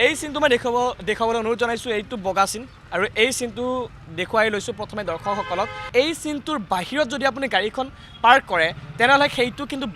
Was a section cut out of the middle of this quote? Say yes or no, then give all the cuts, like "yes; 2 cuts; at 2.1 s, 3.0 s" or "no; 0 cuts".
yes; 1 cut; at 5.8 s